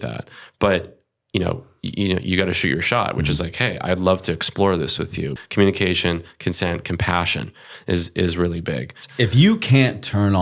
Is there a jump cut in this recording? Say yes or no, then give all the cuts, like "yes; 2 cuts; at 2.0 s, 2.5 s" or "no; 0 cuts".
yes; 2 cuts; at 5.4 s, 9.0 s